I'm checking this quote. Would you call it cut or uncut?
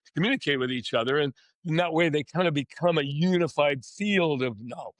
uncut